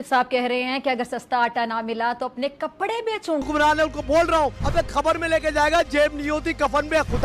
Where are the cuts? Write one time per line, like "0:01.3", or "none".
0:03.4